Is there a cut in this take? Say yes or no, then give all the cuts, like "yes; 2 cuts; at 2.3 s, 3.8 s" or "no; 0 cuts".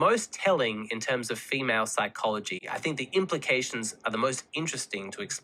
no; 0 cuts